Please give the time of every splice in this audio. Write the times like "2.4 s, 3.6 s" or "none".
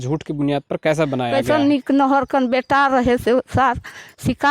1.3 s